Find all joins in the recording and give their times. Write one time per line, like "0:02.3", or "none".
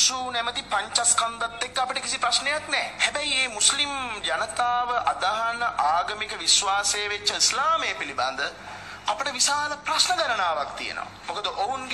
0:05.2